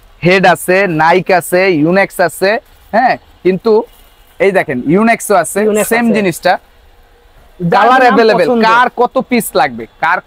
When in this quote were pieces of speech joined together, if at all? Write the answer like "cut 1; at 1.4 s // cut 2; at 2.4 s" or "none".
none